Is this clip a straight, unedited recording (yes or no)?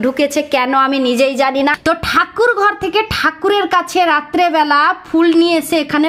no